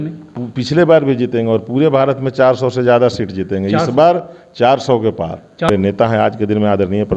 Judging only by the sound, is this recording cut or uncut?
cut